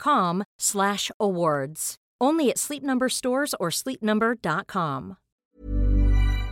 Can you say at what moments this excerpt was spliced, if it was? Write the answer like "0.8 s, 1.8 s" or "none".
5.4 s